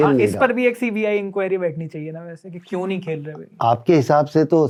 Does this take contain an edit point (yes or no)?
no